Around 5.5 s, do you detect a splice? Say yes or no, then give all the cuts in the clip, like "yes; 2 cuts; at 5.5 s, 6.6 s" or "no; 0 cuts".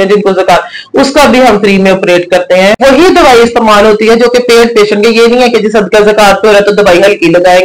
no; 1 cut; at 2.8 s